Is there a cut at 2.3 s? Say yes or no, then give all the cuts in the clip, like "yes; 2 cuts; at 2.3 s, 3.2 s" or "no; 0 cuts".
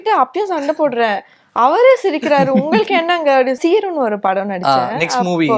no; 1 cut; at 3.6 s